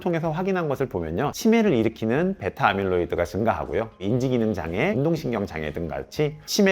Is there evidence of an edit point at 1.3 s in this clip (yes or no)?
yes